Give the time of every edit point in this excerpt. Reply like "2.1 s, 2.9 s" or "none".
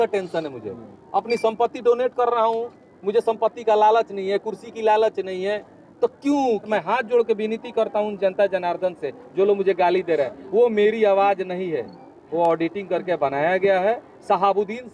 6.7 s